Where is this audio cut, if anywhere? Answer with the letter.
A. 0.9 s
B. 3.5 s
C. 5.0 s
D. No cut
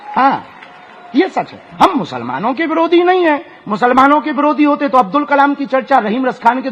D